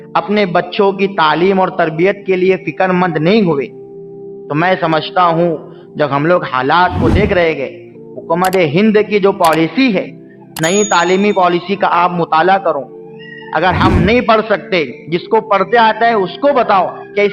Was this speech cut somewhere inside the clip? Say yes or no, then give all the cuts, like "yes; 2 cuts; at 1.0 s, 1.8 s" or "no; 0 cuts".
no; 0 cuts